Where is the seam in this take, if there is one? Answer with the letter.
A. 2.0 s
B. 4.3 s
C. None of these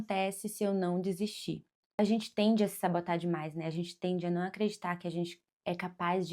A